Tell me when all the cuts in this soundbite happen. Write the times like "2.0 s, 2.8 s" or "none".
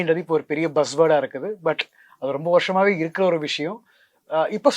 none